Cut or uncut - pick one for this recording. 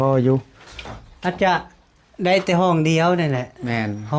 uncut